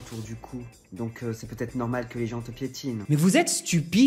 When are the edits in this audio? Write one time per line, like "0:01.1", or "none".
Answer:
0:02.9